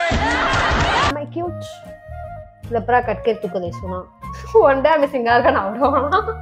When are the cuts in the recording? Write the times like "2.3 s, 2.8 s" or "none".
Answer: 1.1 s